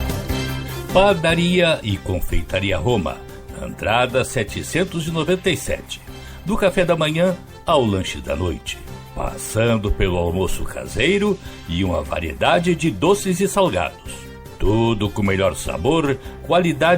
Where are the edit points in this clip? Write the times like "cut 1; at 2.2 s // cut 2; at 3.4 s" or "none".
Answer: cut 1; at 0.9 s